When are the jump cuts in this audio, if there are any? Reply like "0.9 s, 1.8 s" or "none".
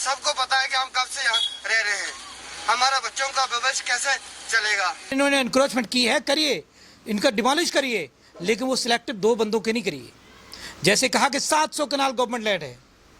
5.1 s